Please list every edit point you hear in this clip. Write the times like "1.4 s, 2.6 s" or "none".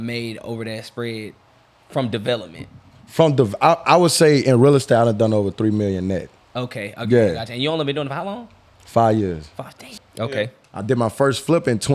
9.9 s